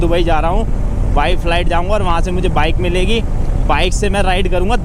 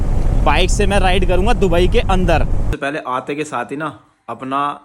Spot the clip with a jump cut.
second; 1 cut; at 2.6 s

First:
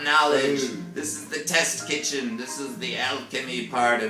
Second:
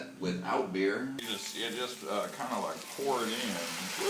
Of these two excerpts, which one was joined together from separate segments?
second; 1 cut; at 1.2 s

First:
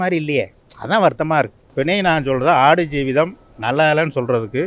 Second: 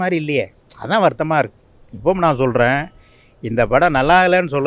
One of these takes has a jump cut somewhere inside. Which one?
first; 1 cut; at 1.6 s

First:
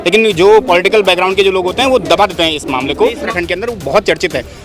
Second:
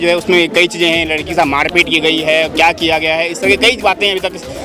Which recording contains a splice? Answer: first; 1 cut; at 3.3 s

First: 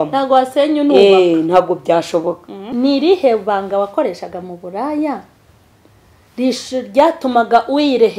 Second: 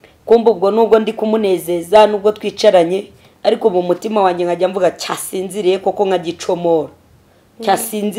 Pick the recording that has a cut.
first; 1 cut; at 2.7 s

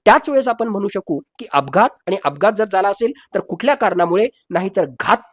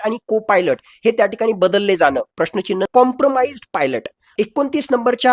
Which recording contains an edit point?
second; 2 cuts; at 2.9 s, 4.3 s

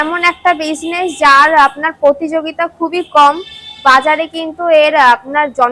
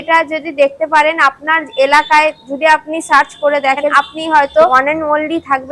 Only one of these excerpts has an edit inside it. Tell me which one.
second; 2 cuts; at 3.9 s, 4.8 s

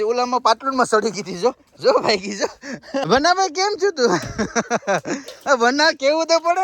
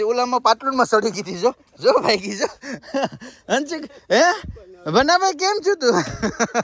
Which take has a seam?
first; 1 cut; at 3.0 s

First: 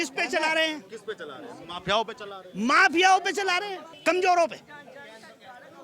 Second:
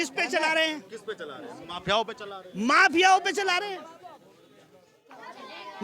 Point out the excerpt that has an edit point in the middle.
first; 1 cut; at 3.8 s

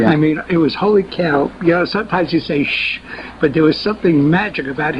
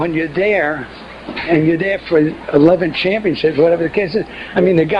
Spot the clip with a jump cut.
first; 1 cut; at 1.1 s

